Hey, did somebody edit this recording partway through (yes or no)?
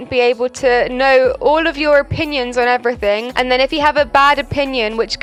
no